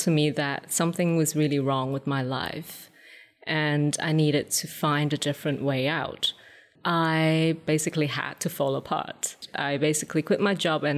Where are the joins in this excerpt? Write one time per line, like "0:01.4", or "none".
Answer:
0:06.7
0:07.6
0:09.5